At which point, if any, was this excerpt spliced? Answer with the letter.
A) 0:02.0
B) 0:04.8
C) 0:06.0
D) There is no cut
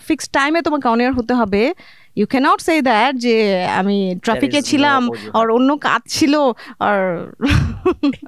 D